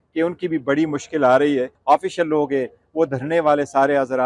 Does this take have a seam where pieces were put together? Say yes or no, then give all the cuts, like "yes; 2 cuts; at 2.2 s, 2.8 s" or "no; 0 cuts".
yes; 1 cut; at 1.7 s